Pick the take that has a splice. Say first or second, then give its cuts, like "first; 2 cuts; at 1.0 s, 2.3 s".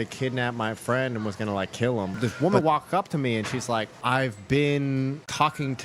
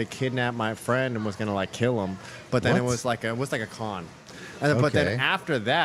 first; 2 cuts; at 2.2 s, 4.0 s